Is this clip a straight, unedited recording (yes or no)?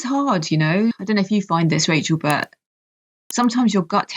no